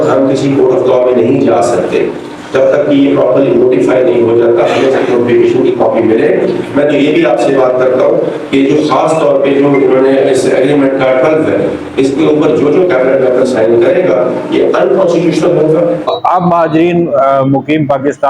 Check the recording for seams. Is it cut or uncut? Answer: cut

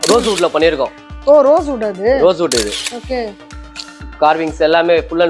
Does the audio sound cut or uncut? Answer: uncut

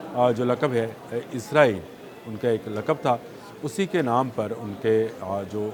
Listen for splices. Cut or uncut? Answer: uncut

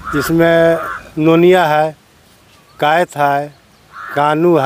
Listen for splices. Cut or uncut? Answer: uncut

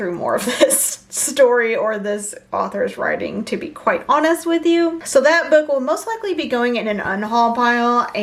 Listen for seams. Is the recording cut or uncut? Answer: uncut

